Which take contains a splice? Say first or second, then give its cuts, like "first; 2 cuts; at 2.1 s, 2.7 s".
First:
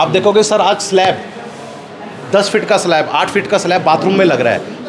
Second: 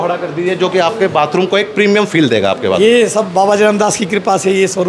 second; 1 cut; at 2.8 s